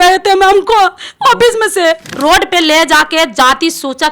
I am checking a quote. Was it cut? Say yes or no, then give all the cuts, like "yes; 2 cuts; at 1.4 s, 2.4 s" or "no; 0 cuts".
yes; 1 cut; at 2.1 s